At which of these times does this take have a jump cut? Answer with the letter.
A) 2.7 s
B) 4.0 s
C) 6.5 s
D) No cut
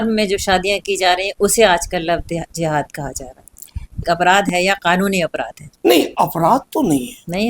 B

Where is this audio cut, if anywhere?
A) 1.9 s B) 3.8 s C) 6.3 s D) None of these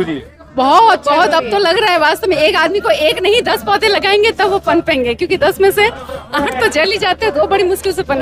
D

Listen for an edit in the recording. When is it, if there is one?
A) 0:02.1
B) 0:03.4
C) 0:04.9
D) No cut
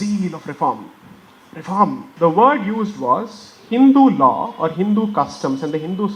A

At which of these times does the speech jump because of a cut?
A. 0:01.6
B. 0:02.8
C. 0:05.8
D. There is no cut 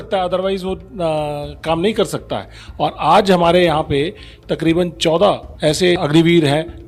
D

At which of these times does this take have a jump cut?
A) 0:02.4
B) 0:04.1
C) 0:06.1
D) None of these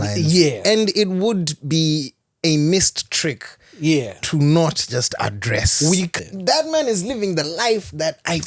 C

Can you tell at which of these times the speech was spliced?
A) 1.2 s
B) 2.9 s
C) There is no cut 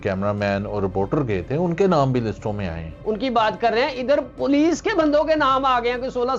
B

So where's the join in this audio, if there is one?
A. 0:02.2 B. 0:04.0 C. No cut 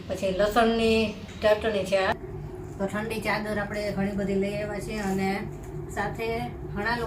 A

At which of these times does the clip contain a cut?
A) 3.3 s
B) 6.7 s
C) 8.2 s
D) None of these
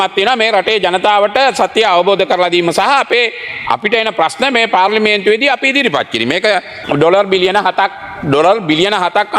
B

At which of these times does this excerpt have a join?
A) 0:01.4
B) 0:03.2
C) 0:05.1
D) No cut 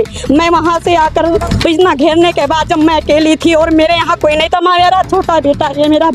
A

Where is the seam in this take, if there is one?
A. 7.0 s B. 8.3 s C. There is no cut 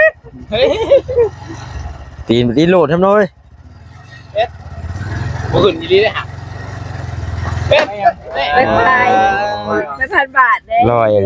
B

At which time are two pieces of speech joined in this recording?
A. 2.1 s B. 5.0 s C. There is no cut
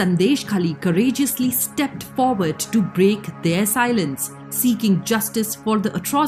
C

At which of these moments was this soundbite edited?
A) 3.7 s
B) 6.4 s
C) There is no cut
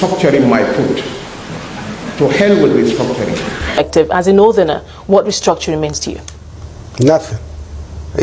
A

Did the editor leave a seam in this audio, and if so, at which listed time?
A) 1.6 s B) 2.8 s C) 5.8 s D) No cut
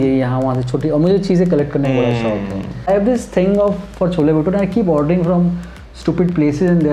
B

